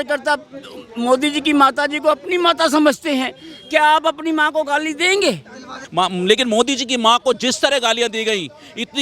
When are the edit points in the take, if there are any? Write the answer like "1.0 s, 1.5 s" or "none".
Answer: 5.7 s